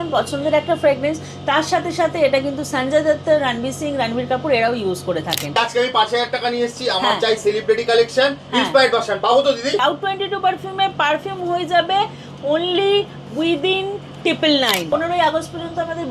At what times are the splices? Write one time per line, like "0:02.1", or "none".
0:05.6
0:09.8
0:14.9